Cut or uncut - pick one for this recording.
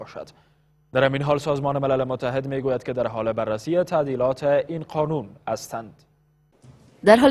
uncut